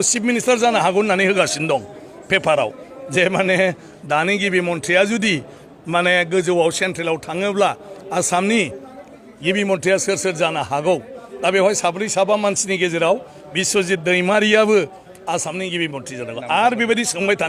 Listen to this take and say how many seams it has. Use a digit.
0